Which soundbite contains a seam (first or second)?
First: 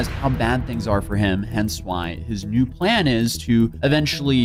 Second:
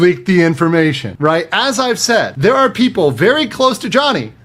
second